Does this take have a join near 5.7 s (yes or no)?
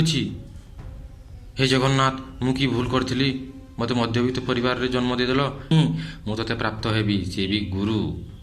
yes